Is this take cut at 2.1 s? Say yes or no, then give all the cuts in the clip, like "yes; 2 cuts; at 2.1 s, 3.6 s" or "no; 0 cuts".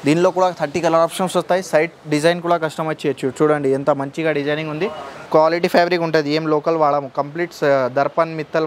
no; 1 cut; at 5.2 s